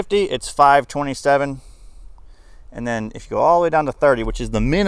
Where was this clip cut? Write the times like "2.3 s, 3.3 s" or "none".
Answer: none